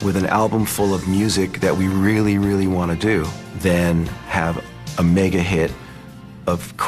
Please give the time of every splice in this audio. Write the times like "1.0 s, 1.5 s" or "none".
3.4 s, 4.5 s

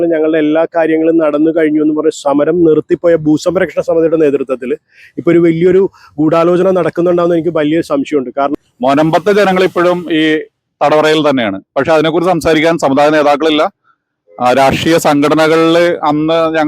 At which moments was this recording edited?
8.6 s

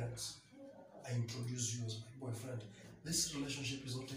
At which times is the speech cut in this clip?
2.9 s

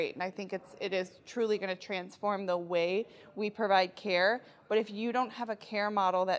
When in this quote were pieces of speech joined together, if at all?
none

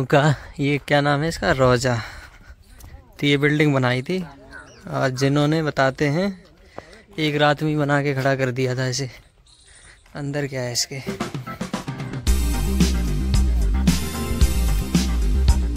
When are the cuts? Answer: none

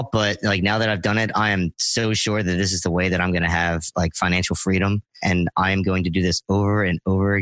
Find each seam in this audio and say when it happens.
5.1 s

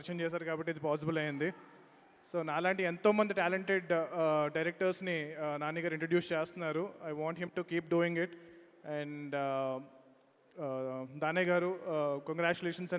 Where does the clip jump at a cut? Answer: none

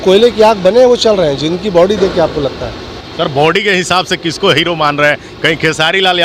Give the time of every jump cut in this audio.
3.0 s

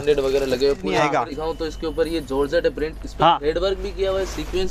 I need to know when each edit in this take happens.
1.0 s

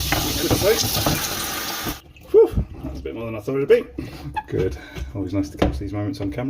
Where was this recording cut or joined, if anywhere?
2.0 s, 4.2 s

